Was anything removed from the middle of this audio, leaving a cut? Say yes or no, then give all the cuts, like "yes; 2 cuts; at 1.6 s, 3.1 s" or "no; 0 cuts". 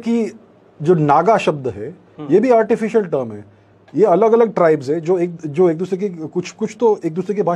no; 0 cuts